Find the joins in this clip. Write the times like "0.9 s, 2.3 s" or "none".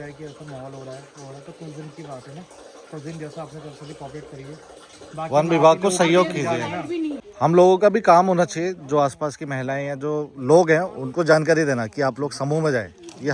7.3 s